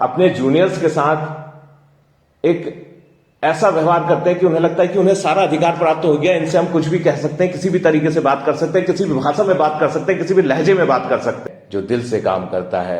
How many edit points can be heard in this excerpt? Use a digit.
1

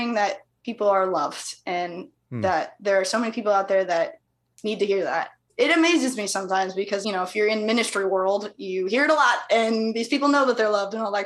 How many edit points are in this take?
0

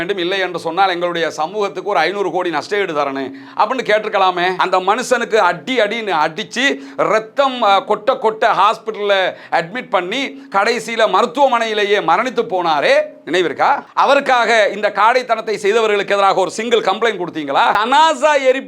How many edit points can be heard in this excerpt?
2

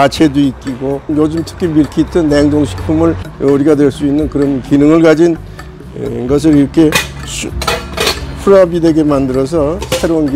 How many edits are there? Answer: 2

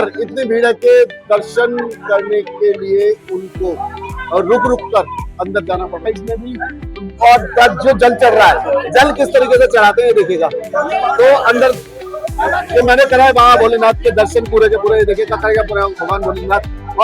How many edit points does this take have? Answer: 1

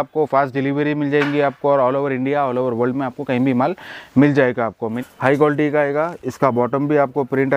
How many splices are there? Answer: 1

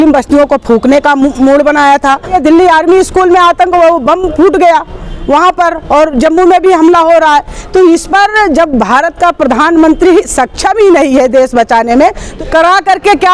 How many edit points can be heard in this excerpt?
2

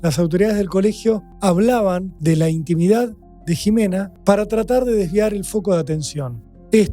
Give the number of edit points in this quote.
3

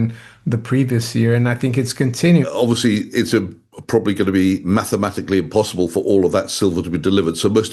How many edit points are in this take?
1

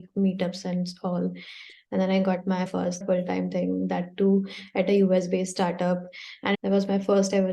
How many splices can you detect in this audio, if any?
2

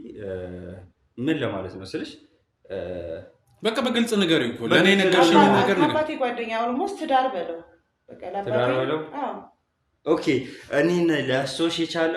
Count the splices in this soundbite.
0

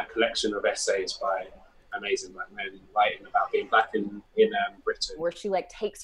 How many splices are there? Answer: 1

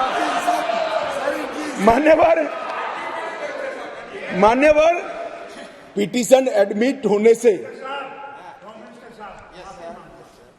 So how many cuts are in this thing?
0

